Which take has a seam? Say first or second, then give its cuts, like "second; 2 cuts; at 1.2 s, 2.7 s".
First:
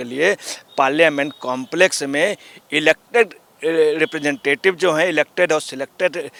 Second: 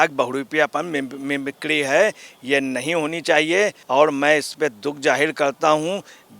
second; 1 cut; at 3.8 s